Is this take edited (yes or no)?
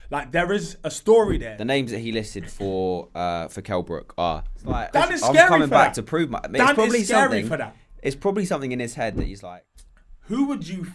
yes